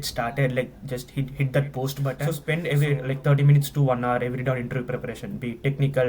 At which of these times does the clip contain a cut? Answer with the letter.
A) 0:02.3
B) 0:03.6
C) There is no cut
A